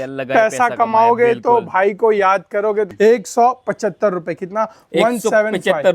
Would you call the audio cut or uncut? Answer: cut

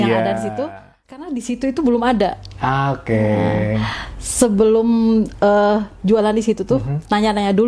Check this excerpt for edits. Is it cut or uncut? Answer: cut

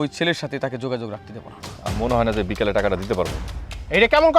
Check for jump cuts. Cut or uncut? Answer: cut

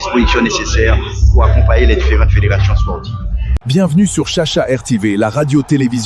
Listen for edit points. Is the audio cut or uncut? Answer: cut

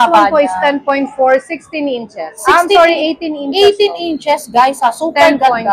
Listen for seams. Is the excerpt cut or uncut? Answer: uncut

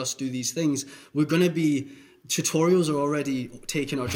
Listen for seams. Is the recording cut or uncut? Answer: uncut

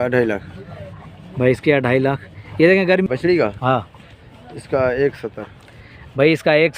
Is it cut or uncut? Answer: cut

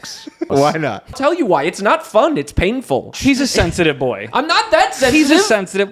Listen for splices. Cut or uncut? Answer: cut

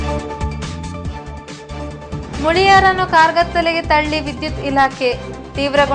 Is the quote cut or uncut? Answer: cut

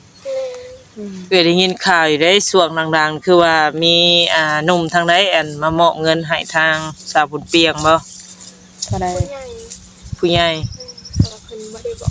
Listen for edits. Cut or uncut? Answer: uncut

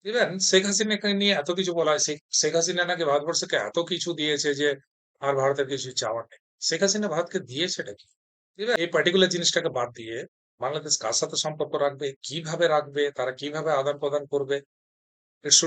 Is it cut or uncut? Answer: cut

